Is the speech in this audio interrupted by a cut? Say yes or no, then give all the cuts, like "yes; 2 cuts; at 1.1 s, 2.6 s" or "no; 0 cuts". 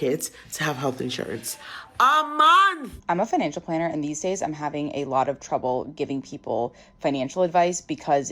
yes; 1 cut; at 2.9 s